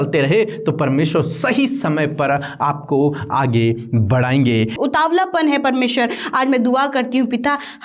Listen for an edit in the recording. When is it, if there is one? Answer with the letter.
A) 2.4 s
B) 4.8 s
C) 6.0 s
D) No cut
B